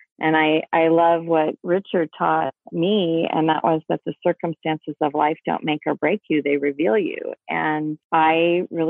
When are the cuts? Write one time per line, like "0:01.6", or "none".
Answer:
0:08.0